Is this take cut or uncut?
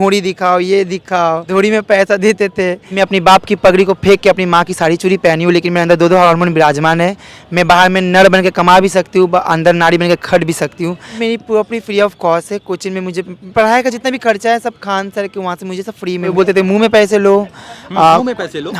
cut